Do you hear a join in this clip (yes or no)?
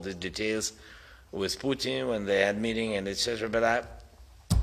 no